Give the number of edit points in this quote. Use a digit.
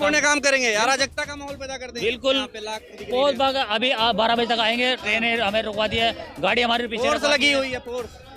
1